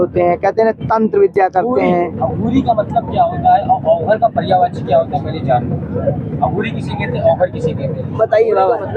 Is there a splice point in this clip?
no; 0 cuts

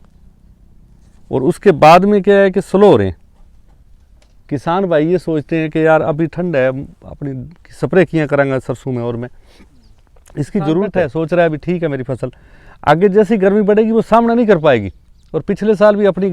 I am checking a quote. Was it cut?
yes; 1 cut; at 10.9 s

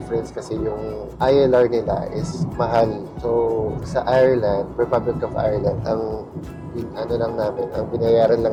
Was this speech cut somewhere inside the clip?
no; 0 cuts

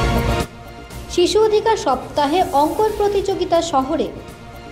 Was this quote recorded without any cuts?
yes; 0 cuts

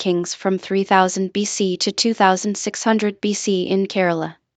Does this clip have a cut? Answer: no; 0 cuts

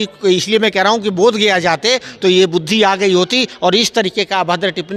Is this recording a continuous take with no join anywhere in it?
yes; 0 cuts

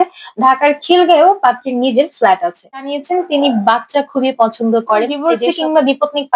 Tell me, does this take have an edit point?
yes; 2 cuts; at 2.9 s, 5.2 s

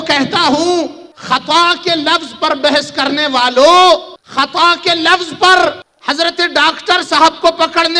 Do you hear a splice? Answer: yes; 3 cuts; at 1.1 s, 4.2 s, 5.9 s

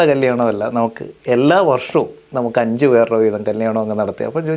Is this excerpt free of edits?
yes; 0 cuts

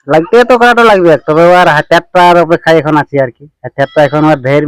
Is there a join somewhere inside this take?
no; 0 cuts

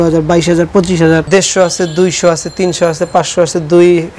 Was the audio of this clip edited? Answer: yes; 1 cut; at 1.2 s

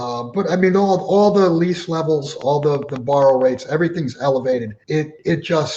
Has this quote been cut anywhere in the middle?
yes; 1 cut; at 4.8 s

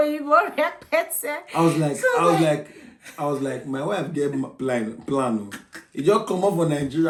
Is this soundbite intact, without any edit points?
yes; 0 cuts

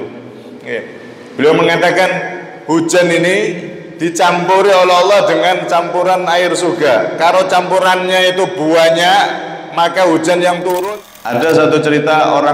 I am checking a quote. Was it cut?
yes; 1 cut; at 10.8 s

